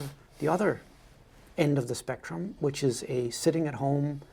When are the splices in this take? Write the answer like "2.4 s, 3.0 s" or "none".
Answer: none